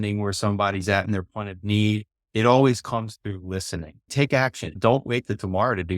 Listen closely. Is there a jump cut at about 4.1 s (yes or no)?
yes